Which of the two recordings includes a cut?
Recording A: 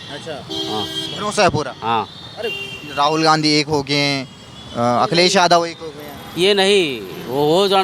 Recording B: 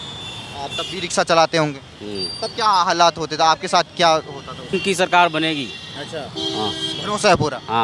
B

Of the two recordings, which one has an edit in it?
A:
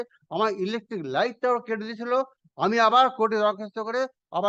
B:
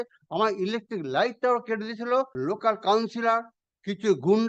B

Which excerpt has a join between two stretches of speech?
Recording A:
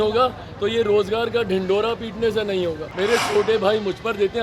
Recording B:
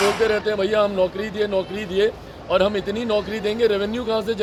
A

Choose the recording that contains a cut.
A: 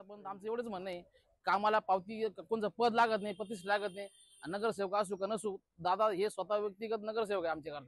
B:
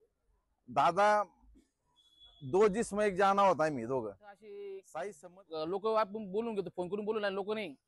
B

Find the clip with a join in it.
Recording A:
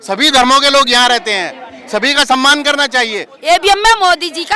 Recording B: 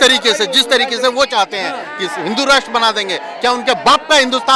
A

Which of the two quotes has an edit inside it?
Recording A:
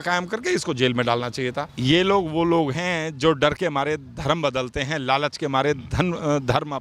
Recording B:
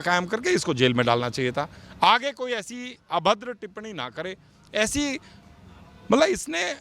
A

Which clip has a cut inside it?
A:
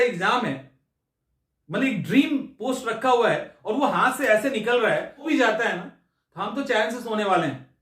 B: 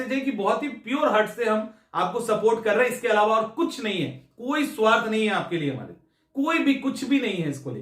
A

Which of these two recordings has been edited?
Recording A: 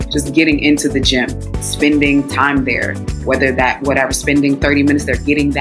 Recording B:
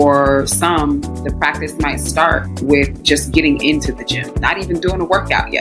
B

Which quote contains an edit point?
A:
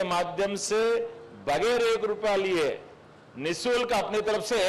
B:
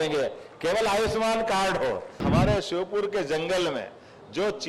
B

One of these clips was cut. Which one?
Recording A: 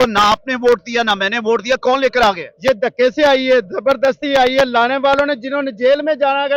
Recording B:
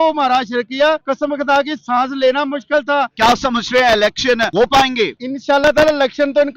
B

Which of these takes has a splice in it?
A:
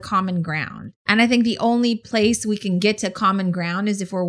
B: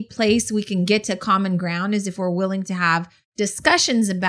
A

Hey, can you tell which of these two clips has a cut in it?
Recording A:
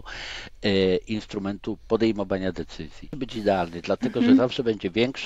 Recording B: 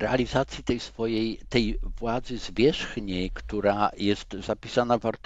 A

